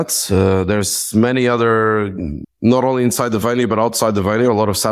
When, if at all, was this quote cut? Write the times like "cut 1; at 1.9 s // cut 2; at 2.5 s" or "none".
none